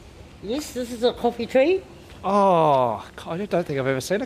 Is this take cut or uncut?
uncut